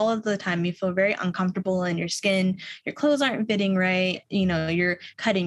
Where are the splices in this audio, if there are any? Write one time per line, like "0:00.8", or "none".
0:04.2